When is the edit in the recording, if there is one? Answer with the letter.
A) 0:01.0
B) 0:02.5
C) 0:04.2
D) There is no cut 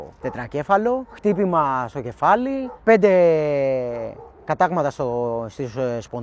D